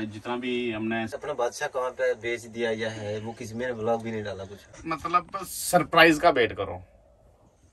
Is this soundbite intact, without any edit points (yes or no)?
no